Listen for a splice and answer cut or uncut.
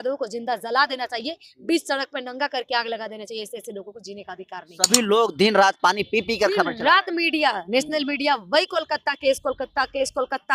cut